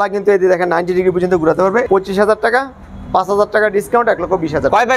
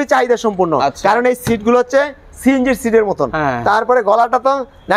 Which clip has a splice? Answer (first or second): first